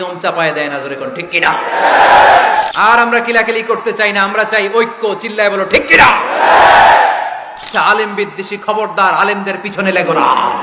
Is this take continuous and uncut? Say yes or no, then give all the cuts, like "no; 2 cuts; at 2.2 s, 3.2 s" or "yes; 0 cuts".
no; 2 cuts; at 2.7 s, 7.7 s